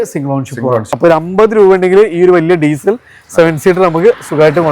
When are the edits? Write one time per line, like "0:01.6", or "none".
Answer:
0:00.9